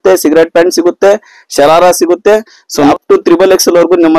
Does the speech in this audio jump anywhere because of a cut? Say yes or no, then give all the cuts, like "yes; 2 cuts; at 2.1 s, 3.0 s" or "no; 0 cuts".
yes; 1 cut; at 2.9 s